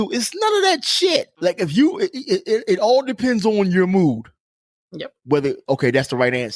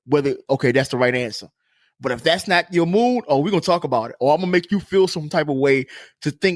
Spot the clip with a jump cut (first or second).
first